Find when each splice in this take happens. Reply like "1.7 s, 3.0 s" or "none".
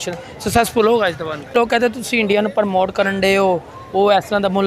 1.5 s